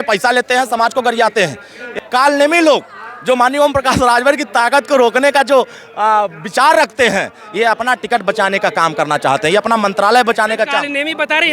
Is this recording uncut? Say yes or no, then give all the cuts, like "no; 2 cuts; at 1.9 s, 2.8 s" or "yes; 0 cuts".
no; 1 cut; at 2.0 s